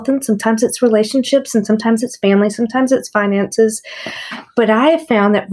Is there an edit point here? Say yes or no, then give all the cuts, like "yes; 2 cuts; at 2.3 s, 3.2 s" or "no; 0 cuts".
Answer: no; 0 cuts